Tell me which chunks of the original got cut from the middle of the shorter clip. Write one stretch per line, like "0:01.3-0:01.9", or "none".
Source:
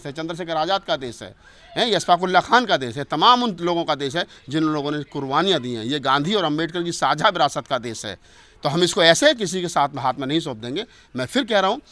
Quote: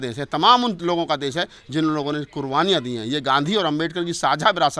none